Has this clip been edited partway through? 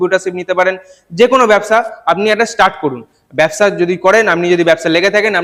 no; 0 cuts

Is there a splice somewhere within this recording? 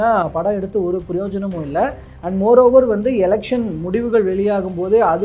no; 0 cuts

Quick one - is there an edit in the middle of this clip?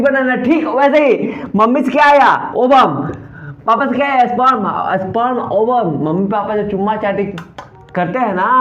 no; 0 cuts

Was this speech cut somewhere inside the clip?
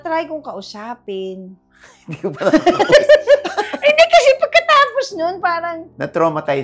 no; 0 cuts

